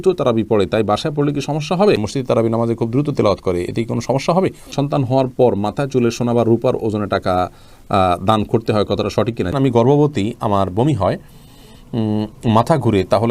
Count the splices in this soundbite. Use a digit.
3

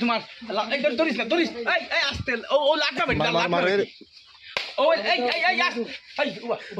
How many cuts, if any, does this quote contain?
0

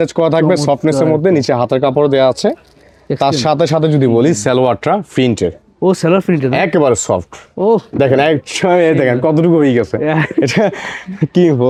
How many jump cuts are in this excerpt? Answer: 0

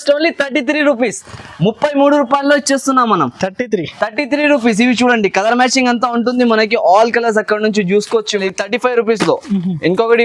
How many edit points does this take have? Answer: 1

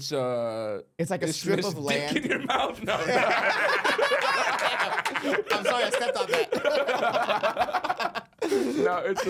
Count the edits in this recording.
0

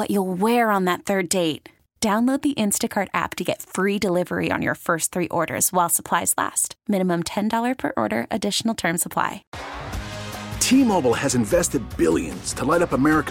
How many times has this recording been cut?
1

